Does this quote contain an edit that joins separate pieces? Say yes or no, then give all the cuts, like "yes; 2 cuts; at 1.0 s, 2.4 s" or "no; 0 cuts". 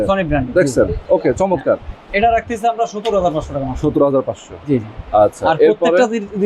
no; 0 cuts